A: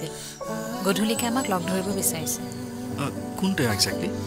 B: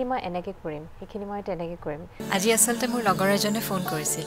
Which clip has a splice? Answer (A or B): B